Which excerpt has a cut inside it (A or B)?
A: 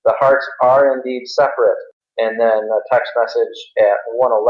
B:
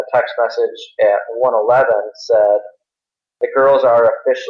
A